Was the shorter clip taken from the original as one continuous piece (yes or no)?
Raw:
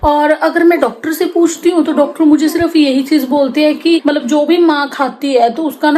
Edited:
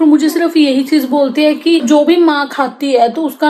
no